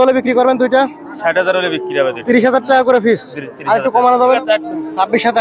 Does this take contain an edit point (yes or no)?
yes